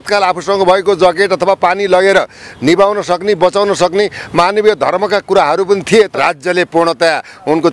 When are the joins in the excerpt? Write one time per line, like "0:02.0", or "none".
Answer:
0:06.1